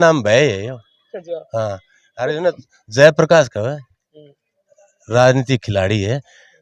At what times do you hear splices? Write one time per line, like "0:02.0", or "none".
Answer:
none

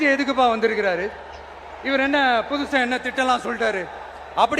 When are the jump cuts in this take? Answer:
none

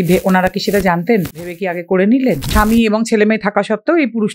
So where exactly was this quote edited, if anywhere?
0:01.5
0:02.5

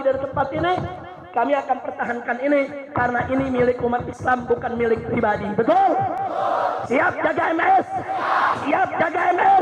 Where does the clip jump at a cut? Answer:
none

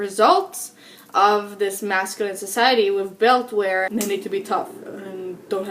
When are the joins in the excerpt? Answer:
0:03.9

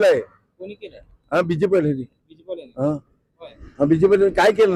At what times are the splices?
none

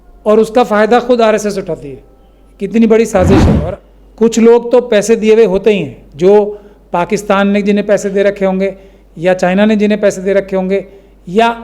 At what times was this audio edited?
0:03.5

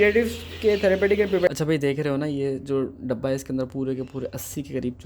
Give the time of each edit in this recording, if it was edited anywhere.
0:01.5

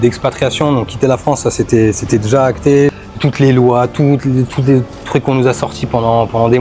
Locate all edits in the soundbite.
0:03.0

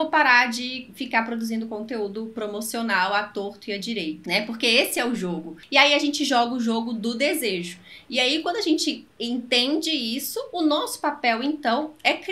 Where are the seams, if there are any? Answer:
0:04.2
0:05.5

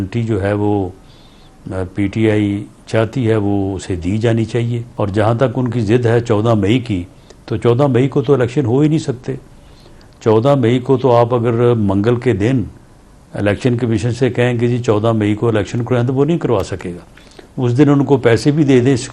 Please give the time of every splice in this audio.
0:04.8

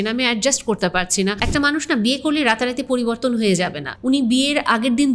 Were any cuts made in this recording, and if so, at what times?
0:01.4
0:03.8

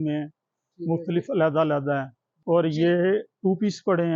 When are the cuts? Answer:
0:02.2

